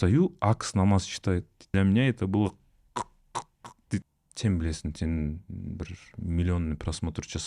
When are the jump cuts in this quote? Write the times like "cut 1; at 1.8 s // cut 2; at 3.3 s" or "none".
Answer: cut 1; at 1.7 s // cut 2; at 4.1 s